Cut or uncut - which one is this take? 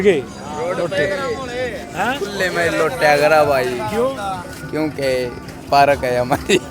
uncut